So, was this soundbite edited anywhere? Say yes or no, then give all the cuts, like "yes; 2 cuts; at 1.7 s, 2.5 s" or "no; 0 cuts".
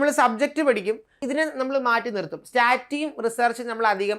yes; 1 cut; at 1.1 s